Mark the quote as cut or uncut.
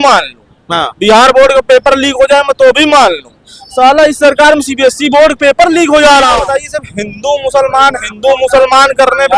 cut